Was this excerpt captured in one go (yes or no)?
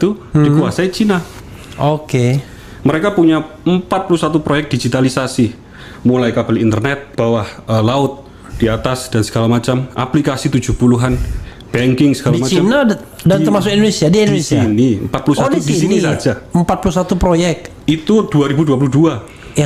yes